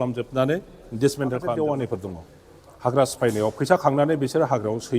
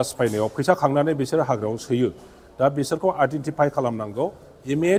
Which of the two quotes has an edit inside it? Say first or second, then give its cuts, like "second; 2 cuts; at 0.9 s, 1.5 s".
first; 1 cut; at 1.5 s